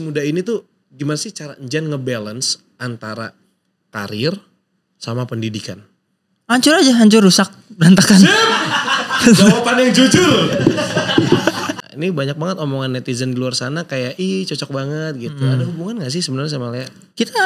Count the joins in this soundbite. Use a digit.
1